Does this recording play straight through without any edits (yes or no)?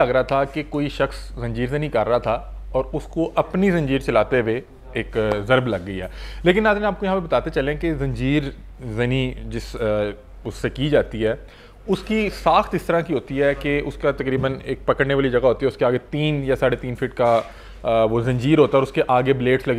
yes